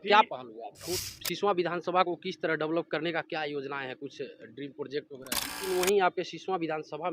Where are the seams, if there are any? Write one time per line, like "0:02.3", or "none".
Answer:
0:01.0
0:05.6